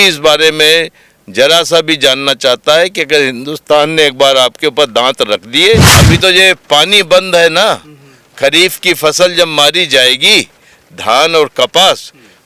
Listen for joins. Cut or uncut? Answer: cut